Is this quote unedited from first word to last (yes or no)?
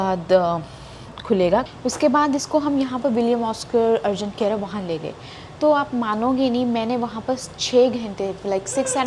no